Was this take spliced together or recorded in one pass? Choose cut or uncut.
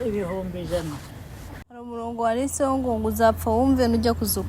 cut